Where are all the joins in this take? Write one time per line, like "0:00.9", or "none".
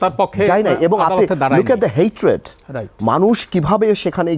none